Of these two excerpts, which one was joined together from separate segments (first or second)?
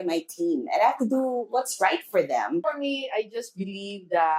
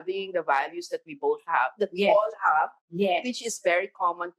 first